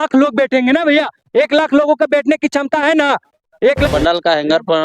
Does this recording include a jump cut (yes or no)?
yes